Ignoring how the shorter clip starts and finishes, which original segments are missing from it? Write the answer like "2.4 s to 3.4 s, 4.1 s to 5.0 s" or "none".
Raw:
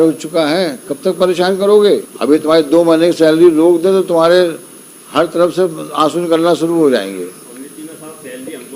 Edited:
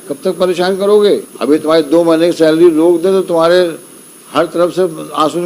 none